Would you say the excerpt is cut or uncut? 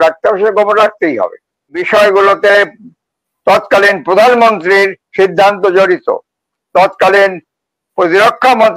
cut